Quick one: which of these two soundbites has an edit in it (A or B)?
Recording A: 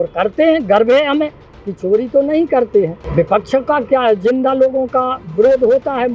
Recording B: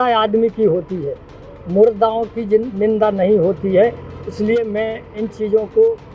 A